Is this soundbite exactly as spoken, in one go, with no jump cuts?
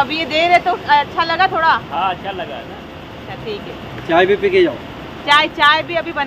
yes; 0 cuts

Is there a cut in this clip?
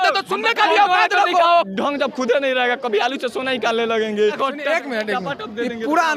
yes; 2 cuts; at 1.7 s, 4.4 s

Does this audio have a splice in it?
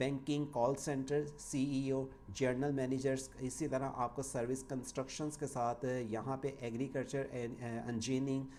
no; 0 cuts

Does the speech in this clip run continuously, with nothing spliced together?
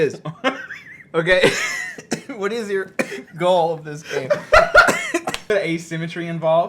no; 1 cut; at 5.5 s

